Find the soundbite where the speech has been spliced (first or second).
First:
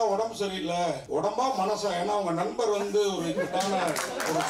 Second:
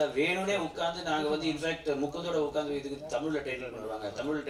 first